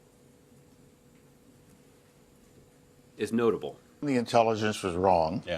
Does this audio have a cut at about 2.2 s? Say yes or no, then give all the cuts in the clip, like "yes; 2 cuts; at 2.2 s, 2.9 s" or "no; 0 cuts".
no; 1 cut; at 4.2 s